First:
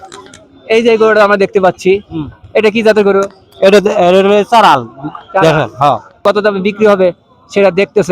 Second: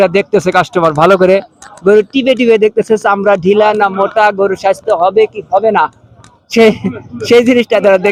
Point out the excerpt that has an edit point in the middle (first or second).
first